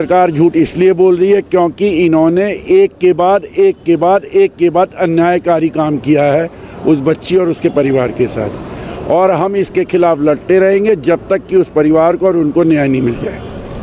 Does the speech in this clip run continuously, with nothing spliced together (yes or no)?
yes